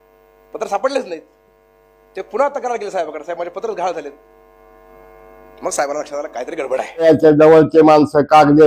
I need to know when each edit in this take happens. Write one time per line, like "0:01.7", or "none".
0:07.0